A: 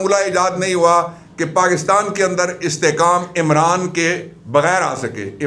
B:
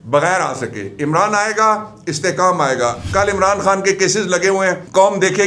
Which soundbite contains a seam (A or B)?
B